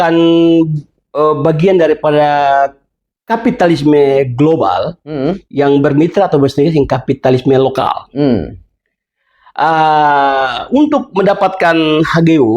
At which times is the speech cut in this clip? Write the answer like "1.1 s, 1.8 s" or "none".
8.6 s